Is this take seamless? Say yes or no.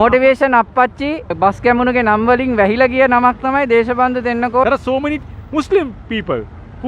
no